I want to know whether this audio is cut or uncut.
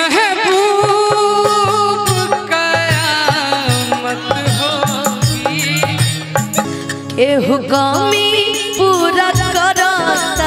cut